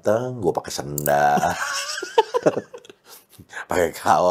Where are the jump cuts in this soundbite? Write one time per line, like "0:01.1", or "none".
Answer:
none